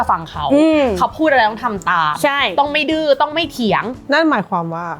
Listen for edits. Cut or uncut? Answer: cut